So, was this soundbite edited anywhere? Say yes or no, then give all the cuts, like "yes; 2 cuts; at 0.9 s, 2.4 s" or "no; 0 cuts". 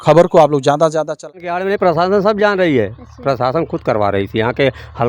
yes; 1 cut; at 1.3 s